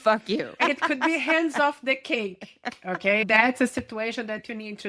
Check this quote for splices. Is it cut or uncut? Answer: cut